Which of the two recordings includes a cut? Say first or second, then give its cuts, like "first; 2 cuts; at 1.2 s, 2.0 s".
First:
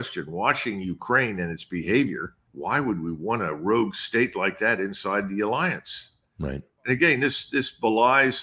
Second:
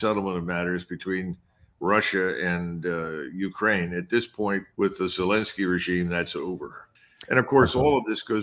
second; 1 cut; at 6.8 s